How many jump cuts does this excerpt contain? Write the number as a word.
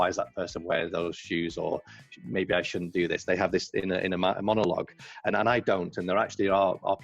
zero